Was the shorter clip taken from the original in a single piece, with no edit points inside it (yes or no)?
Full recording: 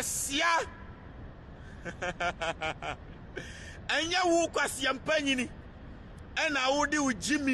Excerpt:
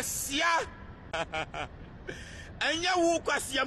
no